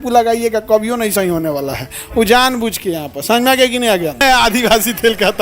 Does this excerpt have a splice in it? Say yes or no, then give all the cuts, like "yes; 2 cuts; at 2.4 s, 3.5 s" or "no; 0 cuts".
yes; 1 cut; at 4.2 s